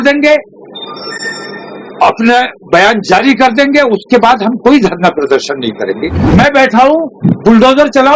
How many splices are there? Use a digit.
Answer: 1